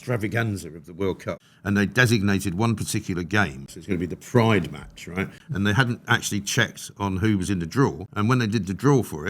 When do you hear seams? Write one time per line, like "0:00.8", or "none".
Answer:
0:01.4
0:03.7
0:05.4
0:08.0